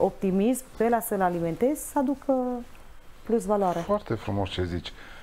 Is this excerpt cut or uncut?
uncut